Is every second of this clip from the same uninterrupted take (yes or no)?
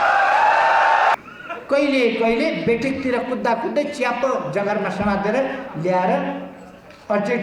no